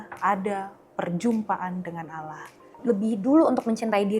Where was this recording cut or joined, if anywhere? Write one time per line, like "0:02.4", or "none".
0:02.8